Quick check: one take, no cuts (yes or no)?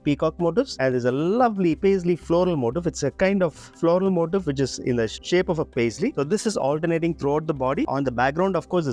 yes